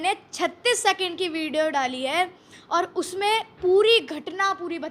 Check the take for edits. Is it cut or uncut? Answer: uncut